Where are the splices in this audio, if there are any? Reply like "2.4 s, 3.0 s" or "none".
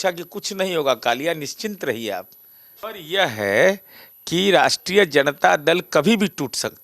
2.8 s